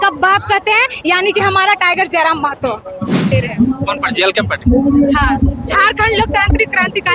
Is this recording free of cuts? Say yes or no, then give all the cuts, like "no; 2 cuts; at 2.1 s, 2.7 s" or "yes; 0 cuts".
no; 1 cut; at 3.3 s